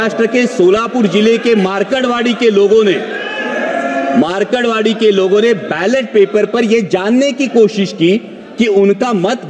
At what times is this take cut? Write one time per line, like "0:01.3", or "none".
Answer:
none